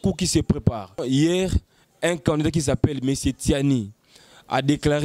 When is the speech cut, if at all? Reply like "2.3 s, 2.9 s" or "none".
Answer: 1.0 s